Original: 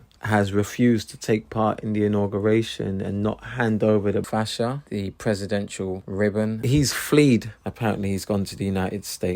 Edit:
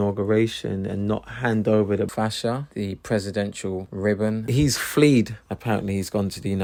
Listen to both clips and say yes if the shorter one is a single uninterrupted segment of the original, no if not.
yes